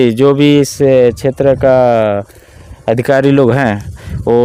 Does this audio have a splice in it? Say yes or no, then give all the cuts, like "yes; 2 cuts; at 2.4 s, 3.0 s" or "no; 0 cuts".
no; 0 cuts